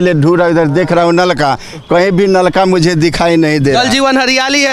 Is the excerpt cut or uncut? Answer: uncut